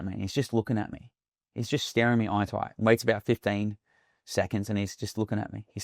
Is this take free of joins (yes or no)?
yes